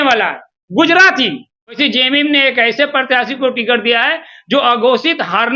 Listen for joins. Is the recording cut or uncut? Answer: cut